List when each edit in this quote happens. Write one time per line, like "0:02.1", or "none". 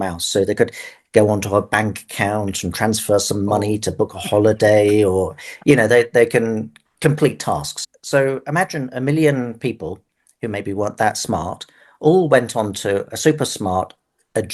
0:07.7